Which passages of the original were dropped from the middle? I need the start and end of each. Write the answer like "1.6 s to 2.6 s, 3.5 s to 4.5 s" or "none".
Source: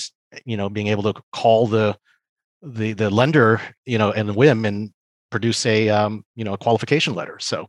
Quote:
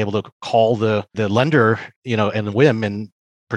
2.0 s to 2.9 s